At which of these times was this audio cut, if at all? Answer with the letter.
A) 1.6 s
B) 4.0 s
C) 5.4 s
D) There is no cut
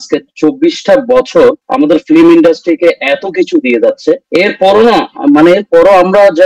D